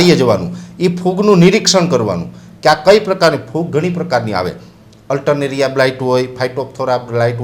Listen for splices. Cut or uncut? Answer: uncut